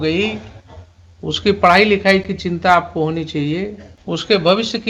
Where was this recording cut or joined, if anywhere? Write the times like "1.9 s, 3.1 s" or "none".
3.9 s